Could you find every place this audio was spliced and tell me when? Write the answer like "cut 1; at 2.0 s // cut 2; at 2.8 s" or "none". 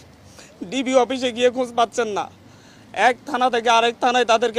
none